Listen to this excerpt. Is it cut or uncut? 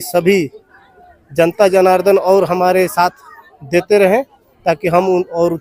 uncut